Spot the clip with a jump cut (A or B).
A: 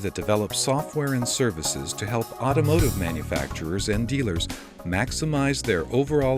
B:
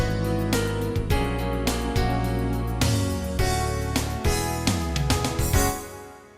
B